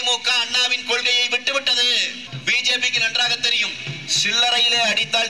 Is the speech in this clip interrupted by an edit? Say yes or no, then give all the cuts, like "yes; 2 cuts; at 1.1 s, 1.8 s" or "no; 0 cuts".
yes; 1 cut; at 2.2 s